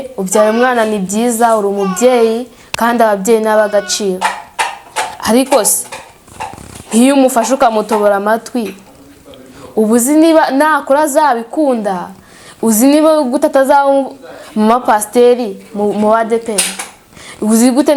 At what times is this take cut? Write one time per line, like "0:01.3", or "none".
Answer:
none